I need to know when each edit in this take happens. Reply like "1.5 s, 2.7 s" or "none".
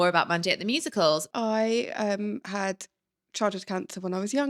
1.3 s